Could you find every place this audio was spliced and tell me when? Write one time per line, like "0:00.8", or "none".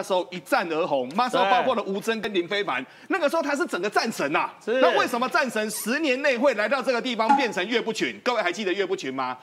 none

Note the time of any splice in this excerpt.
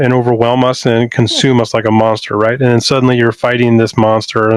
none

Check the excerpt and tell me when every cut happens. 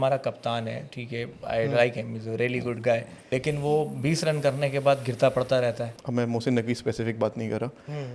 0:03.1
0:05.9

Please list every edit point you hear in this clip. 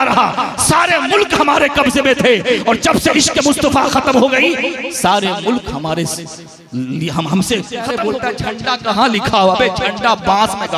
0:08.0

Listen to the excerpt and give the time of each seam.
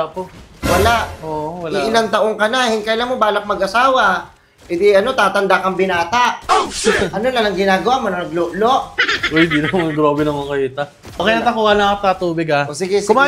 0:11.0

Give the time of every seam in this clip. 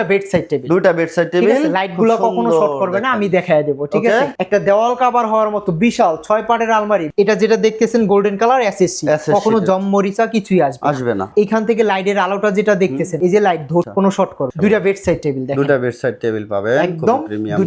0:04.3
0:07.1
0:11.3
0:14.5

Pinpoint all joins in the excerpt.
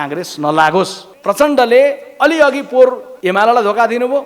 0:01.1
0:03.1

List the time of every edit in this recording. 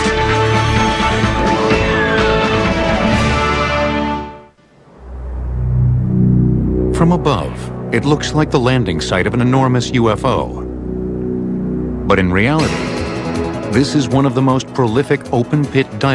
0:11.7

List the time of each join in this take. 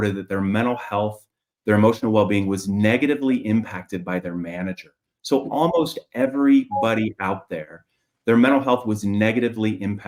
none

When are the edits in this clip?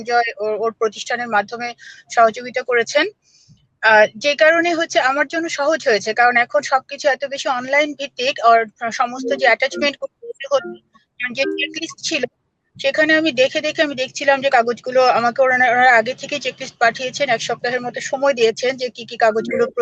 none

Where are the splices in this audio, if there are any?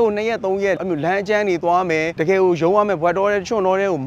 0:00.8
0:02.2

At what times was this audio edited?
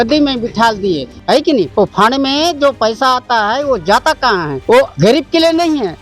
none

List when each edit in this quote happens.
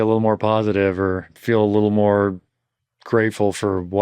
0:01.3

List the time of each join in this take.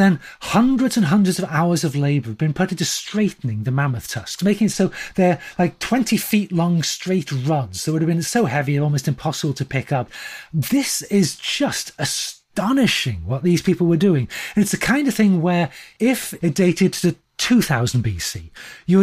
0:10.2
0:15.9

